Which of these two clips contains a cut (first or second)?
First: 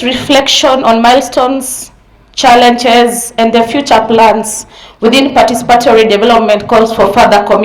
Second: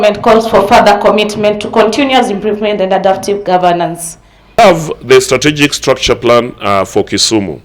second